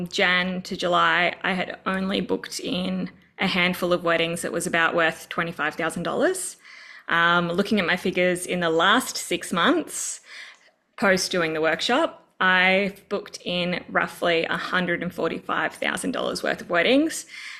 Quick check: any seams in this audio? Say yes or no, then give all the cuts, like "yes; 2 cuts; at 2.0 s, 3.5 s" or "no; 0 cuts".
no; 0 cuts